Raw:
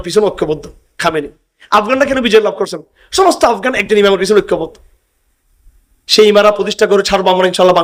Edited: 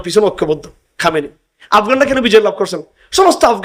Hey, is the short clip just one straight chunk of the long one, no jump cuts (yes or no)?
yes